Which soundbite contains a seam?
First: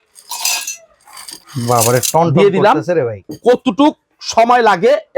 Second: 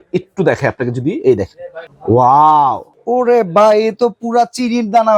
first; 2 cuts; at 1.3 s, 3.2 s

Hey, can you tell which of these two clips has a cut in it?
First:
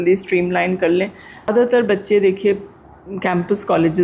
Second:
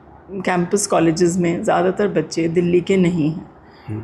first; 1 cut; at 1.8 s

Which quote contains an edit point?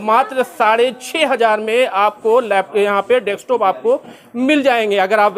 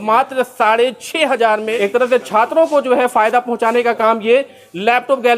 second; 1 cut; at 1.7 s

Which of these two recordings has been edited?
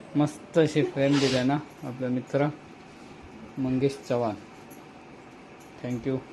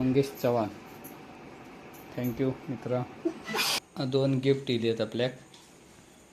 second; 1 cut; at 3.8 s

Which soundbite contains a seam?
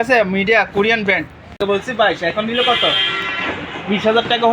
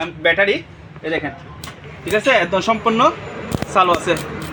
first; 1 cut; at 1.6 s

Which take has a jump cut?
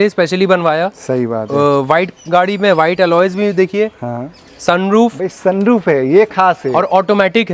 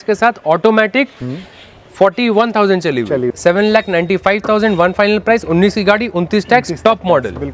second; 1 cut; at 3.3 s

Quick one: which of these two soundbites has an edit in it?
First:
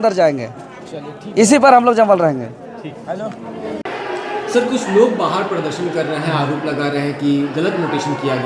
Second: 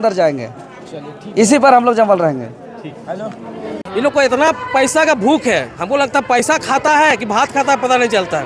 second; 1 cut; at 3.8 s

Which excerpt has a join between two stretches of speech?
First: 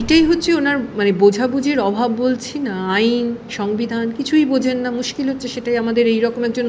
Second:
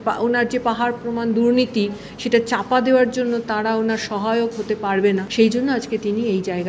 second; 1 cut; at 5.3 s

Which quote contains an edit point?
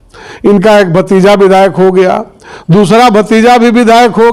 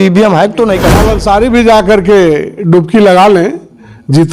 second; 1 cut; at 1.1 s

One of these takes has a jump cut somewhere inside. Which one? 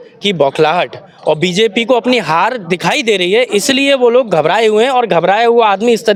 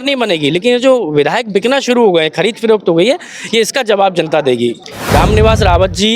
second; 1 cut; at 4.9 s

